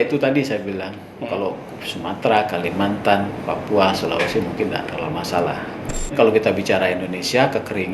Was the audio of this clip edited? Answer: yes; 1 cut; at 6.1 s

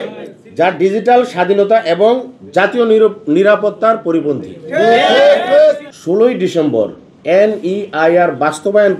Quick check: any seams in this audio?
yes; 1 cut; at 5.9 s

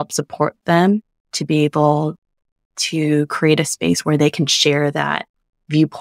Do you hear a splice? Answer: no; 0 cuts

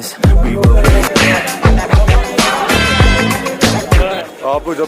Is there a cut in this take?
yes; 1 cut; at 1.1 s

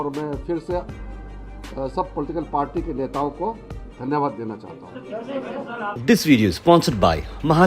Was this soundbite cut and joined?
yes; 1 cut; at 6.0 s

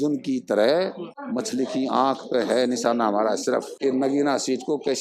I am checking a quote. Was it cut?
yes; 2 cuts; at 1.1 s, 3.7 s

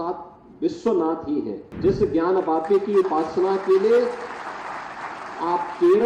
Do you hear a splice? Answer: yes; 1 cut; at 1.6 s

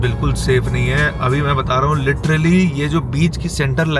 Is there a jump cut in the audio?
no; 0 cuts

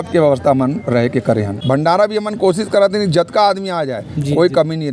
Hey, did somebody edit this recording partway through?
yes; 1 cut; at 1.6 s

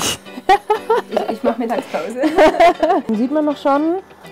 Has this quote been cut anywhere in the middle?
yes; 1 cut; at 3.0 s

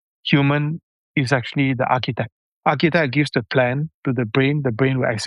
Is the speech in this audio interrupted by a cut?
yes; 1 cut; at 2.4 s

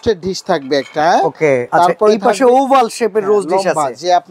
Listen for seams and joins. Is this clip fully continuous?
no; 1 cut; at 1.7 s

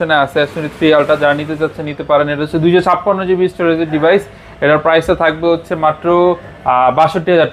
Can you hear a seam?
no; 0 cuts

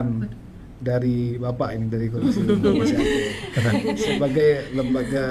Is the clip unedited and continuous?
yes; 0 cuts

